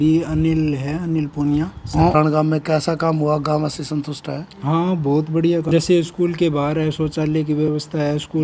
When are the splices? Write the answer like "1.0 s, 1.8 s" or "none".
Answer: 2.1 s, 5.6 s